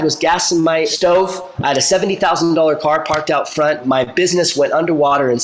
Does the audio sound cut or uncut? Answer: cut